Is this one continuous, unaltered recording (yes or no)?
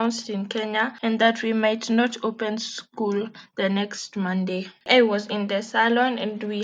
no